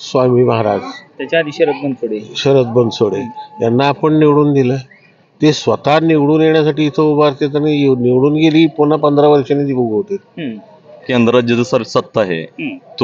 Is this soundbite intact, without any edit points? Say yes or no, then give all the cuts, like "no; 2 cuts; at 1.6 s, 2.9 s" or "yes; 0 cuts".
no; 1 cut; at 11.0 s